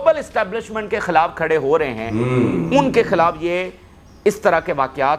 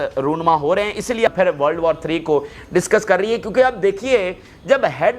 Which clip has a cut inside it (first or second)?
second